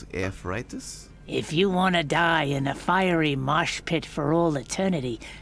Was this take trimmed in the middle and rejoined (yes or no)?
no